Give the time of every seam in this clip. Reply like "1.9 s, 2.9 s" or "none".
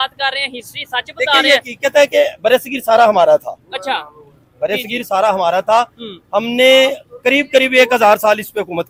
none